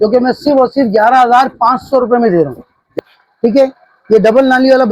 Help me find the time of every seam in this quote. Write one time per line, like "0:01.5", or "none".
0:02.9